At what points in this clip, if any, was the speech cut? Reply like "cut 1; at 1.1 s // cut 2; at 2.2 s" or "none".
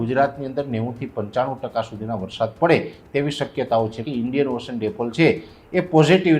cut 1; at 4.0 s